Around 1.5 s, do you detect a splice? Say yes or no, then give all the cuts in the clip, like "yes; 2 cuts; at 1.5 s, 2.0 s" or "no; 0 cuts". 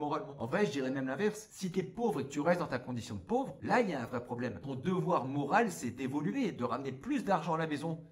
yes; 2 cuts; at 1.5 s, 4.6 s